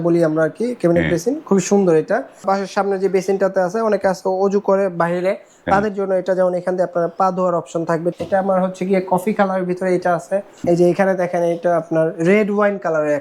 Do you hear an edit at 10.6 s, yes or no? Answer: yes